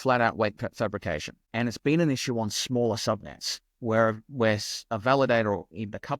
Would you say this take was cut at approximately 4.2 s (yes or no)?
no